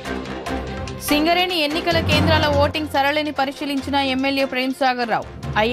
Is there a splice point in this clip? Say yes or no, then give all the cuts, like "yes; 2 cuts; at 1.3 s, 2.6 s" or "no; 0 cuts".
yes; 1 cut; at 1.1 s